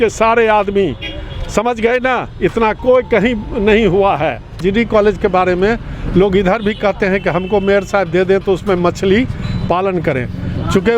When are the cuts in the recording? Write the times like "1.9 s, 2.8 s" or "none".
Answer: 4.6 s

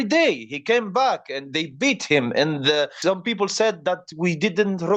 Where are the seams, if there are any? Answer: 2.9 s

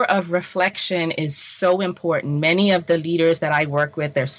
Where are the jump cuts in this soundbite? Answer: none

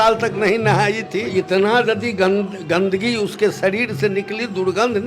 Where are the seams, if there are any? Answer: 1.3 s

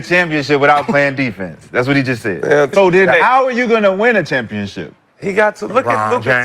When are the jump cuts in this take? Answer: 2.7 s

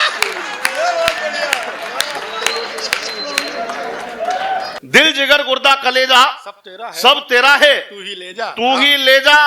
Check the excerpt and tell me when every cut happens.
4.7 s

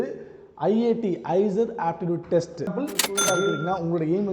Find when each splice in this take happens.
3.0 s

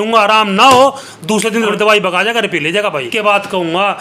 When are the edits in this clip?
1.3 s, 3.1 s

